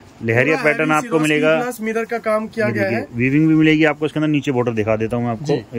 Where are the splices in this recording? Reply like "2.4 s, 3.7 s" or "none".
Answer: none